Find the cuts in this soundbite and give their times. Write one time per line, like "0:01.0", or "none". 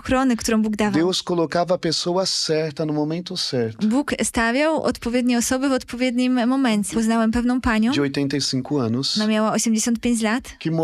0:06.9